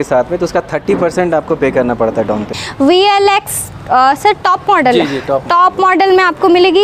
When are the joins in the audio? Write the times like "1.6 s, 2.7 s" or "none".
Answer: 2.5 s